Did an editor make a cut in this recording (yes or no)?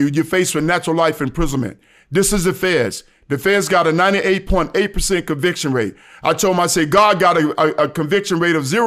no